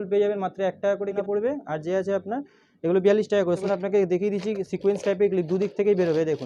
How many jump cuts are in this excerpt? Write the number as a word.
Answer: two